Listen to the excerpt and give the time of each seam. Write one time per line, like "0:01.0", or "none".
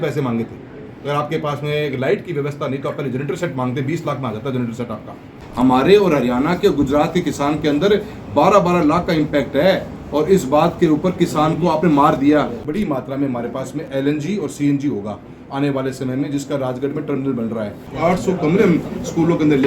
0:05.4
0:12.6
0:13.9
0:17.7